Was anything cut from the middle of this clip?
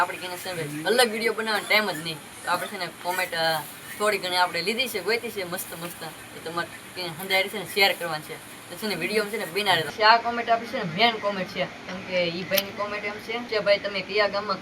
yes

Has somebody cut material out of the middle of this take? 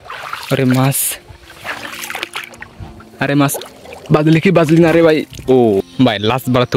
yes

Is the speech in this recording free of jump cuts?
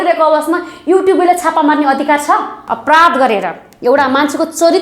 no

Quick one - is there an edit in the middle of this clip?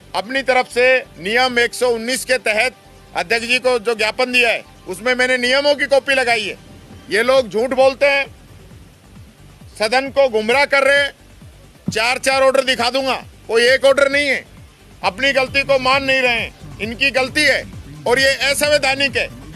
no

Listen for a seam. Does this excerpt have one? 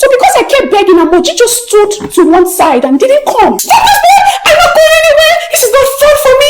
yes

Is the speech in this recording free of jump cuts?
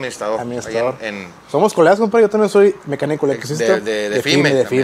yes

